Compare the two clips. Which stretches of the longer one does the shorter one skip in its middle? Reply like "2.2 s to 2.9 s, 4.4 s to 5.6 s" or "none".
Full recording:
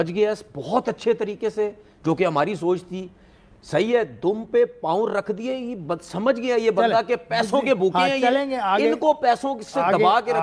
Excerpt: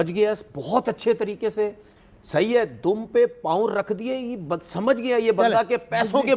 1.9 s to 3.2 s